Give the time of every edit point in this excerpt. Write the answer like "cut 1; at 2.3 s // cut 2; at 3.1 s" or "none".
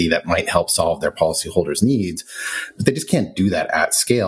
none